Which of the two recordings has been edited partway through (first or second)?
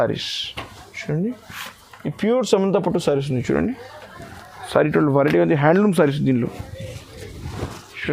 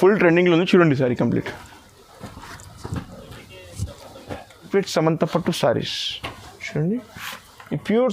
second